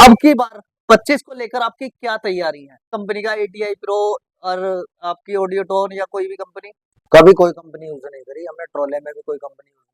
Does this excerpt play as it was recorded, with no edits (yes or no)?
no